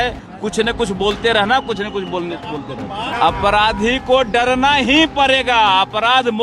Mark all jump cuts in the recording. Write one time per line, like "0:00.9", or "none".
0:03.1